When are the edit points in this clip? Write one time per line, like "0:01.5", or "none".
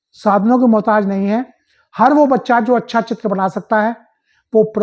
none